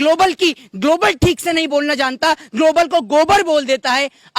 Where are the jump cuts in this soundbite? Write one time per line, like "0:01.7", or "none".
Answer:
none